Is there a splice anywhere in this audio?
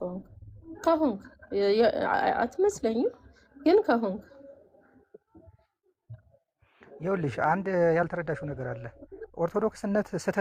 no; 0 cuts

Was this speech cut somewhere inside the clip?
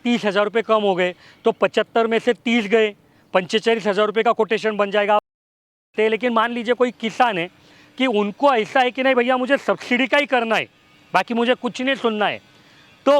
yes; 1 cut; at 5.7 s

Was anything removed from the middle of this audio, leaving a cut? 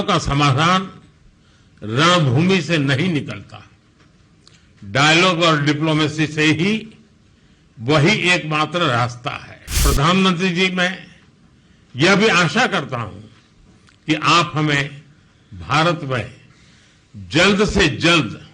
yes; 1 cut; at 9.8 s

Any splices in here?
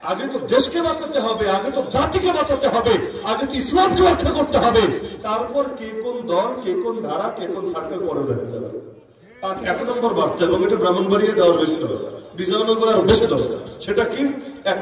yes; 1 cut; at 9.7 s

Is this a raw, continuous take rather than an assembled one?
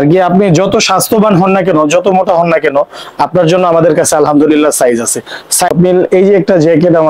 no; 1 cut; at 5.5 s

